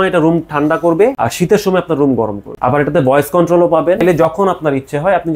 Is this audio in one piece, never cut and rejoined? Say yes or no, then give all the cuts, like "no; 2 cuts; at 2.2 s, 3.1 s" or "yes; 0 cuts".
no; 3 cuts; at 1.2 s, 2.4 s, 4.2 s